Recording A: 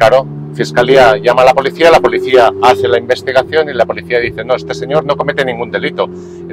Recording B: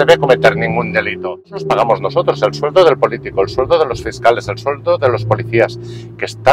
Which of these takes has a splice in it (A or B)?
B